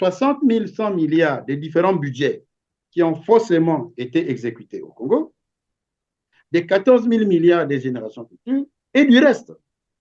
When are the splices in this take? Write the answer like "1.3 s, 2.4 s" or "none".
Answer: none